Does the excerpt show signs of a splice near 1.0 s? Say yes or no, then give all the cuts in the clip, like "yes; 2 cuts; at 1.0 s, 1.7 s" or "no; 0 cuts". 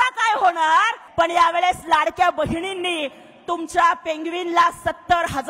yes; 1 cut; at 1.0 s